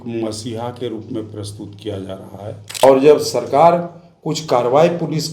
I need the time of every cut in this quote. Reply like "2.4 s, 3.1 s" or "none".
2.8 s